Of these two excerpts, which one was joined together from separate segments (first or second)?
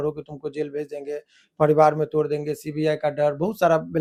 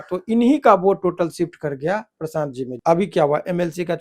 second